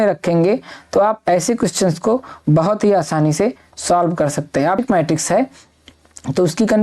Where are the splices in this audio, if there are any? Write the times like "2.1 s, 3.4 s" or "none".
4.8 s